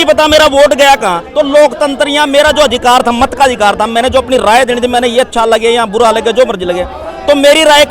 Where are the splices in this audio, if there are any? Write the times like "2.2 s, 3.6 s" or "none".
none

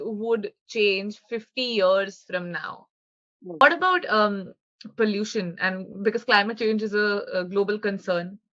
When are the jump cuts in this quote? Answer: 3.6 s

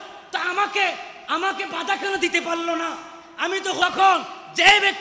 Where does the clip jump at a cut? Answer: 3.8 s

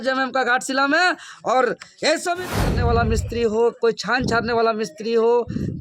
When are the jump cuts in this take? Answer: 2.7 s

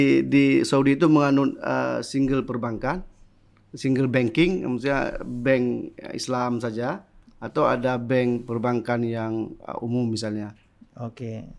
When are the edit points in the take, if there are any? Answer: none

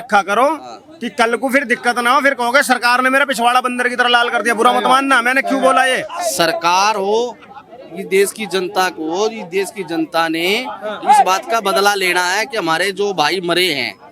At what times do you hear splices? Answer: 6.1 s

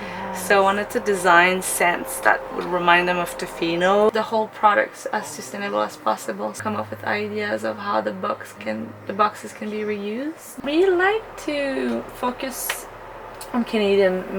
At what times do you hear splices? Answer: 2.5 s, 4.1 s, 6.6 s, 10.5 s

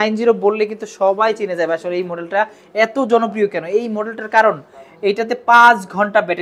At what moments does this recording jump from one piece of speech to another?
none

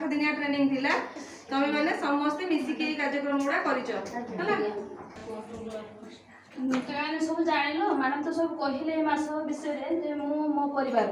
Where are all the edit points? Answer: none

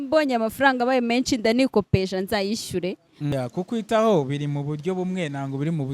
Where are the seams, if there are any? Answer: 3.3 s

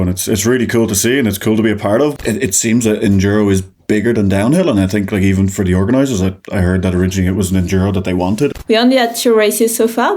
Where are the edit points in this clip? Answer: 2.1 s, 8.5 s

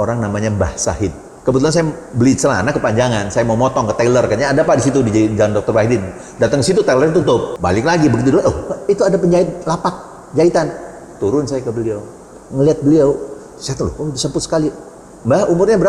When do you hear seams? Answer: 1.3 s, 7.5 s

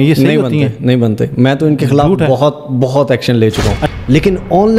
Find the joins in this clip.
3.8 s

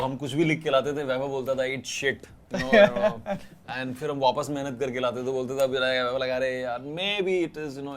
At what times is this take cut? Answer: none

